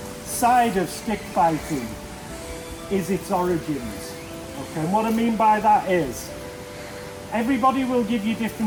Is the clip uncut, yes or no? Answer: yes